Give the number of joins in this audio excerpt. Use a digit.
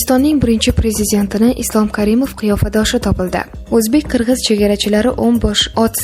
1